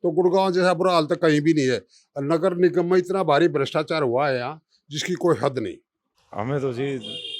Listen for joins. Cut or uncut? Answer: cut